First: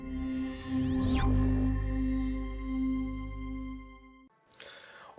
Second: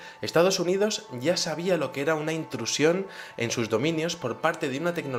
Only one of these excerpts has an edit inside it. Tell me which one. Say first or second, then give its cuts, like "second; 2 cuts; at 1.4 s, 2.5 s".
first; 1 cut; at 4.1 s